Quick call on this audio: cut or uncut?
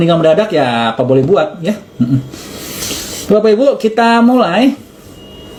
uncut